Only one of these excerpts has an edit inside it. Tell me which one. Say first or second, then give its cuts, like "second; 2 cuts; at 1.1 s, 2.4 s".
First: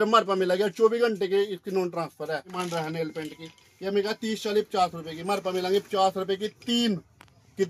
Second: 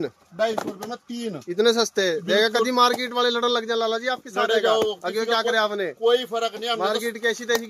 first; 1 cut; at 2.6 s